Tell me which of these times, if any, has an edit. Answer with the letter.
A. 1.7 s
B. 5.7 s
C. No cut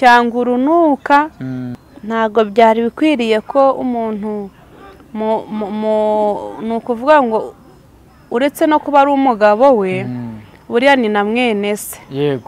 A